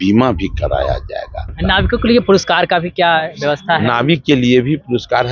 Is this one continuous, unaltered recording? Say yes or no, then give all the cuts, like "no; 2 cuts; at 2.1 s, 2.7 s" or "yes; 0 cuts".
no; 1 cut; at 1.5 s